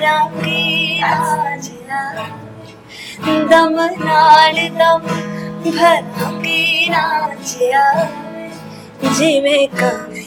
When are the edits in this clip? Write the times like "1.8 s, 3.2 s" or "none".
none